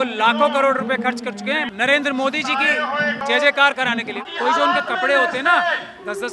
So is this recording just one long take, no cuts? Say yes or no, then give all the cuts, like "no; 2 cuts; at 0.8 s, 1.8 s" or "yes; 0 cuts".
no; 3 cuts; at 1.7 s, 3.2 s, 4.2 s